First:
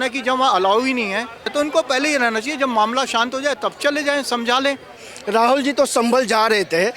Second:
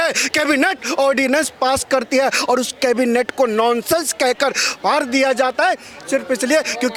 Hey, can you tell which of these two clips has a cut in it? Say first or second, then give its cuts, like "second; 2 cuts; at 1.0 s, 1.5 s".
first; 2 cuts; at 1.5 s, 5.0 s